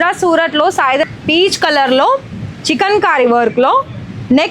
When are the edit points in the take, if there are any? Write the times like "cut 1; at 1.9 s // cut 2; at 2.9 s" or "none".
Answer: cut 1; at 1.1 s